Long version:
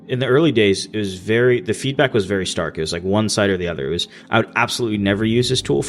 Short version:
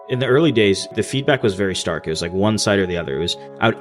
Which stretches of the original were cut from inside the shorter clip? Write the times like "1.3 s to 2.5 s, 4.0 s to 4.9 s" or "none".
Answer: 0.9 s to 1.6 s